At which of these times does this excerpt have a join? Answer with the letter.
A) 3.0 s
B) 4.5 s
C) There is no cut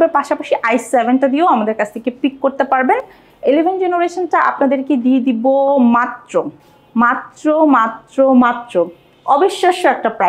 C